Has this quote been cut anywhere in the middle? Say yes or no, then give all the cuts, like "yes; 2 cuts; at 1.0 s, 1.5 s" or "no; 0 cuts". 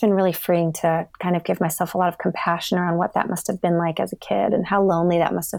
no; 0 cuts